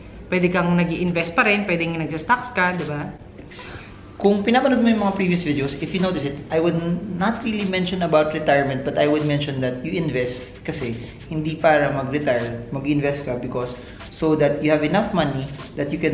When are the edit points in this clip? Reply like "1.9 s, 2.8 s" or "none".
none